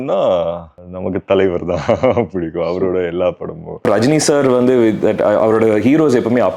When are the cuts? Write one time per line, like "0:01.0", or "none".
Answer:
0:03.8